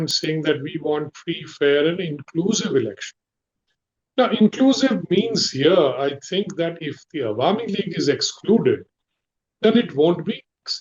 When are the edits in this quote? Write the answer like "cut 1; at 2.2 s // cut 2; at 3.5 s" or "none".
none